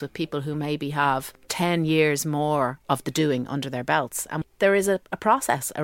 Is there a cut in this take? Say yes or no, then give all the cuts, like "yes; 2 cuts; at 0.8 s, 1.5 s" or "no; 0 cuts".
yes; 2 cuts; at 1.4 s, 4.4 s